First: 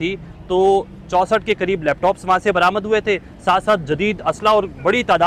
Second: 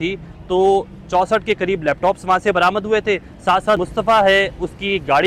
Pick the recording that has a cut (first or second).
second